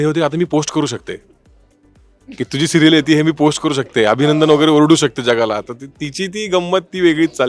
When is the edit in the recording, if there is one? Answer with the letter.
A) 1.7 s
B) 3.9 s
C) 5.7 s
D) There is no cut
D